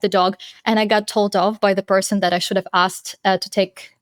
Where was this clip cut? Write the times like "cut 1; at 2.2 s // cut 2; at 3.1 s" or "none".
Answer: none